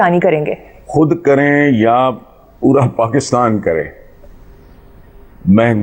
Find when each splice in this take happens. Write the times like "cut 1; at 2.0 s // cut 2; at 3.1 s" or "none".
none